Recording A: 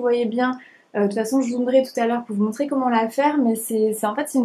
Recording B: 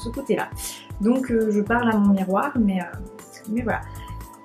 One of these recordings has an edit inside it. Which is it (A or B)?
B